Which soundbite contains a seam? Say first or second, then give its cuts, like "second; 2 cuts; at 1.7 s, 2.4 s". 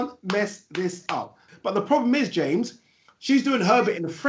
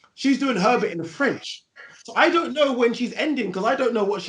first; 1 cut; at 1.4 s